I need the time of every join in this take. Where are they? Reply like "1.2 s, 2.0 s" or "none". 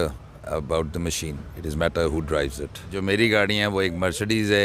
2.9 s

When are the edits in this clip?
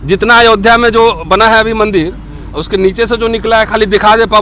none

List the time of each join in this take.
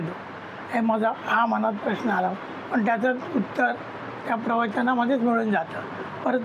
none

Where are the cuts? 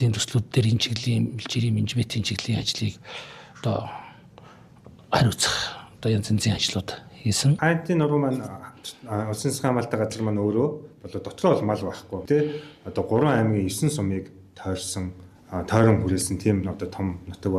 7.6 s

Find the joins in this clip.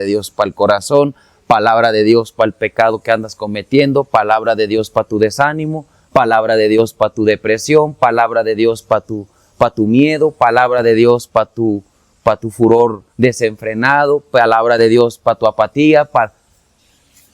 none

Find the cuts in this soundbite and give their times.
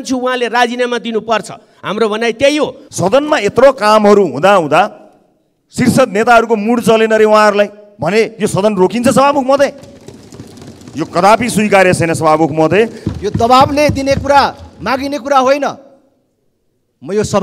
2.8 s, 13.1 s

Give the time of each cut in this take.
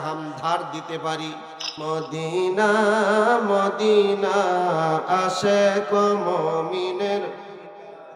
1.8 s

